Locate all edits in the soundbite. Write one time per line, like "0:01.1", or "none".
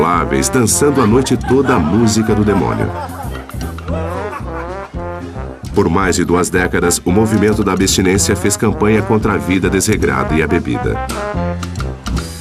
0:08.5